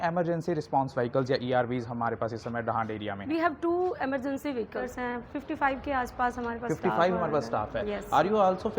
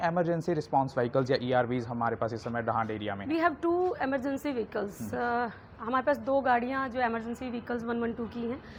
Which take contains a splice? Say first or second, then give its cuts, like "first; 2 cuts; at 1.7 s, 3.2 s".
first; 1 cut; at 4.9 s